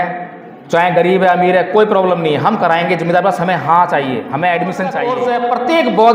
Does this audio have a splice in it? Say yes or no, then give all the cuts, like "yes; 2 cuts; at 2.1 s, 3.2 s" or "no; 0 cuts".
yes; 1 cut; at 5.1 s